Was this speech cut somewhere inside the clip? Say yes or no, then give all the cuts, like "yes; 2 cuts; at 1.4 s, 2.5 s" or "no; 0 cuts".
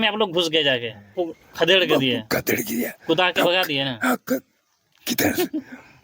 yes; 1 cut; at 1.2 s